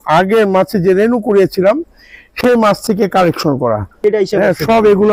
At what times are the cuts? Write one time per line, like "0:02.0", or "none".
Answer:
0:04.0